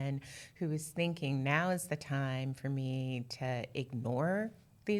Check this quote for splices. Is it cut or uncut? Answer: uncut